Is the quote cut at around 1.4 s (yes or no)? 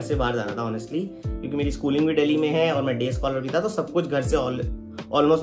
no